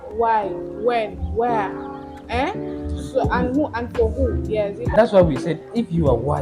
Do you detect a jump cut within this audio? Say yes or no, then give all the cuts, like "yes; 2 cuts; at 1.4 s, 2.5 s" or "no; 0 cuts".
yes; 1 cut; at 4.7 s